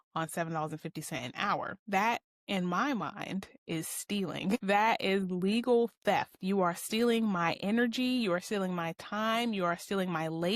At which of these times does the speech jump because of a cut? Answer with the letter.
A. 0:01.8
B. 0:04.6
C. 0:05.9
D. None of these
A